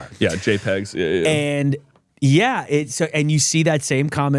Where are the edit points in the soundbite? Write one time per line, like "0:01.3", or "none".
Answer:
none